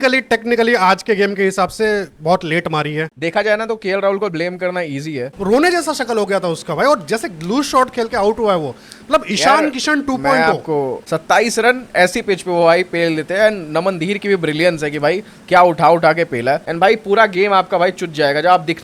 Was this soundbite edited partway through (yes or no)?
yes